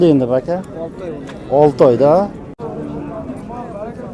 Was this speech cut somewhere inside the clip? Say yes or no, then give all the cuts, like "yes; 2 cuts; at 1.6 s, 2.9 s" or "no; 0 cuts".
yes; 1 cut; at 2.5 s